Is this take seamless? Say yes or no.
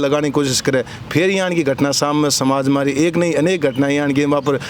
yes